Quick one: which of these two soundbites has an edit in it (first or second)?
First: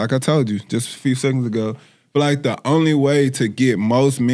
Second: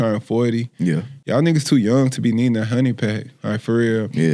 second